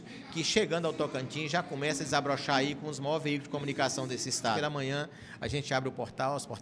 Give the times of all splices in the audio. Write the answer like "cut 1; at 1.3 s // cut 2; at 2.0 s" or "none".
cut 1; at 4.6 s